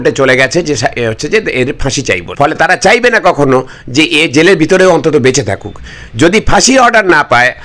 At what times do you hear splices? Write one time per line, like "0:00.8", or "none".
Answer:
0:02.3